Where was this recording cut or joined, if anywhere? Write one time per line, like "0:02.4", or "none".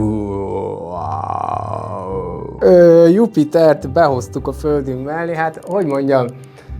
0:02.4